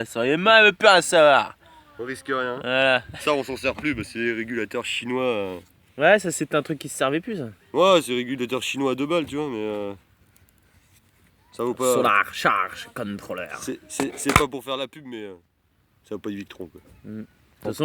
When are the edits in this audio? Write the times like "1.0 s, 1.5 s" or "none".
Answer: none